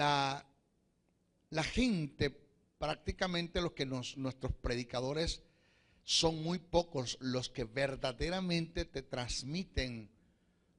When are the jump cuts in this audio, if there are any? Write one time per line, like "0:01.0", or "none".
none